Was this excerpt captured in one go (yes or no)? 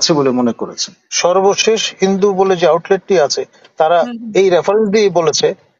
no